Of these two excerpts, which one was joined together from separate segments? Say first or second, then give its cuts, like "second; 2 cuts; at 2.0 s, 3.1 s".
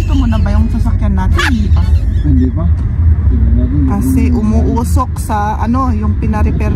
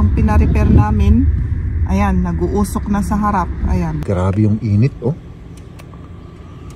second; 1 cut; at 4.0 s